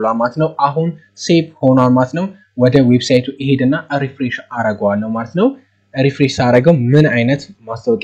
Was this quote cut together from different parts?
no; 0 cuts

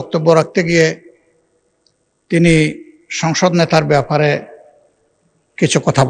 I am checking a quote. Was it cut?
no; 0 cuts

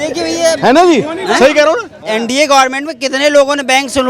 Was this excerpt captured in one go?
no; 1 cut; at 2.0 s

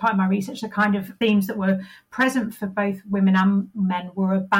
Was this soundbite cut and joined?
yes; 1 cut; at 1.2 s

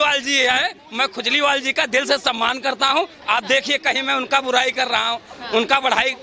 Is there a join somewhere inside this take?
no; 0 cuts

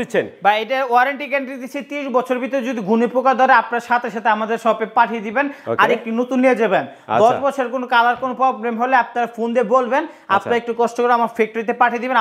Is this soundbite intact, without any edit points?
yes; 0 cuts

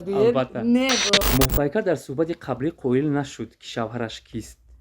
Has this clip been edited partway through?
yes; 1 cut; at 1.3 s

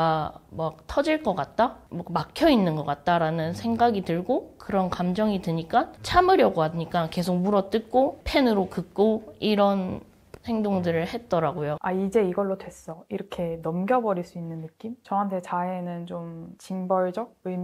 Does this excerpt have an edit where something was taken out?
yes; 3 cuts; at 6.0 s, 8.2 s, 11.8 s

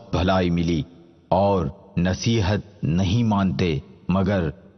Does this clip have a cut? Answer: no; 0 cuts

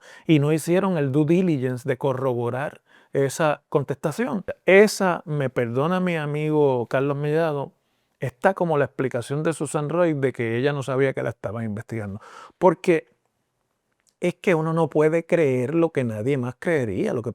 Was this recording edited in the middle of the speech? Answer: yes; 1 cut; at 4.5 s

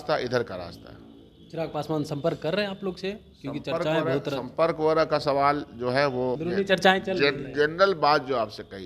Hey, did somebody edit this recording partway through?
yes; 1 cut; at 6.4 s

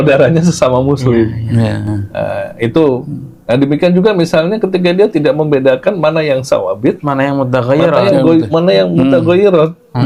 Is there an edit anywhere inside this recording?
no; 0 cuts

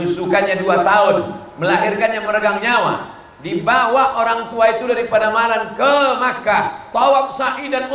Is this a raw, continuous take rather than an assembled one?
yes; 0 cuts

